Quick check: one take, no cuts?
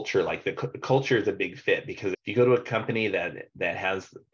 no; 1 cut; at 2.2 s

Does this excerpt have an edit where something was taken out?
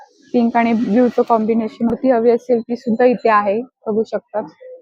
yes; 1 cut; at 2.0 s

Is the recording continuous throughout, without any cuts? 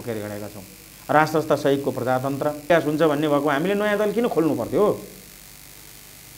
no; 1 cut; at 2.6 s

